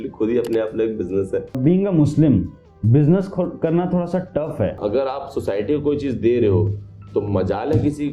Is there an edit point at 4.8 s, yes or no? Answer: yes